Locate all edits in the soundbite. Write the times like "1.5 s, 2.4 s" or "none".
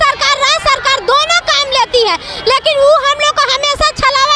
none